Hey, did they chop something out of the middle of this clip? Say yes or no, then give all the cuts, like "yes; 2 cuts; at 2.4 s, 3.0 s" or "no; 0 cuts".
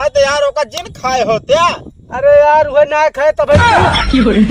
yes; 1 cut; at 3.6 s